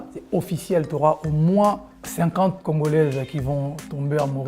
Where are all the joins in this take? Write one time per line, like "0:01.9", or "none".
0:02.6